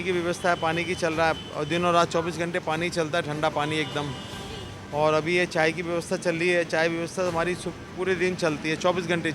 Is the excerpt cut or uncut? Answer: uncut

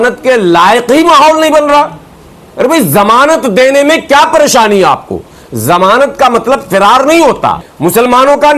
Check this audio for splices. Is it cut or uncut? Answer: cut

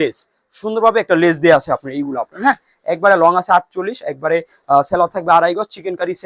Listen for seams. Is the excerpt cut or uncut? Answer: uncut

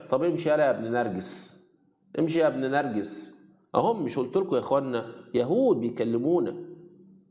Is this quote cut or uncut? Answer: uncut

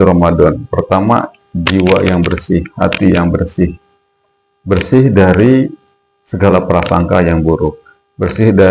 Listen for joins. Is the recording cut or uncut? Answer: uncut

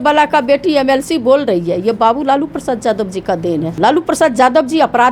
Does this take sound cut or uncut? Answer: cut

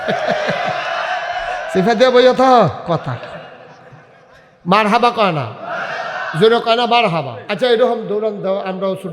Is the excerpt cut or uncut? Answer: cut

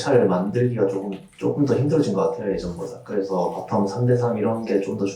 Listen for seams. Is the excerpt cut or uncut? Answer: uncut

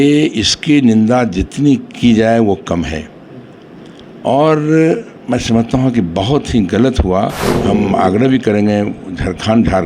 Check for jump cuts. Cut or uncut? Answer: cut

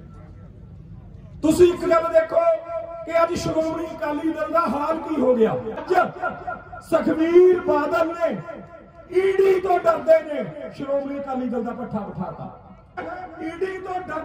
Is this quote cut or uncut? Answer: cut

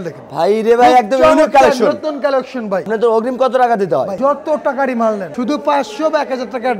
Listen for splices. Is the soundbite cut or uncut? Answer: cut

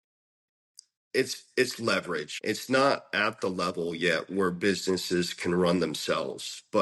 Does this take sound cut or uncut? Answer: cut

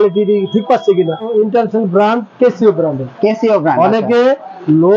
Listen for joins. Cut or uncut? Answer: cut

